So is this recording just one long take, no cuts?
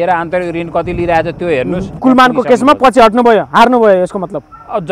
no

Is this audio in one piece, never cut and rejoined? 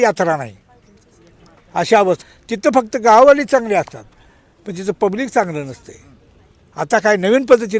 no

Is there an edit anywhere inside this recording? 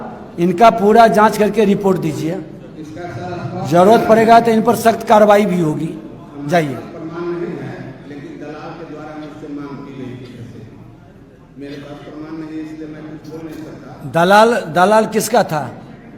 no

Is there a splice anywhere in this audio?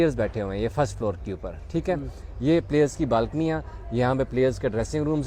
no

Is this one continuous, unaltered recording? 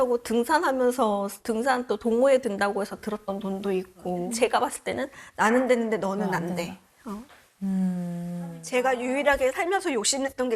no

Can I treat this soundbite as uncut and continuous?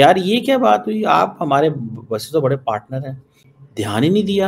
yes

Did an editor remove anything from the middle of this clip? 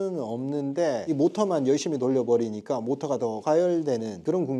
no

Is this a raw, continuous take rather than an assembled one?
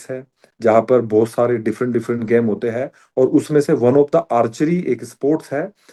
yes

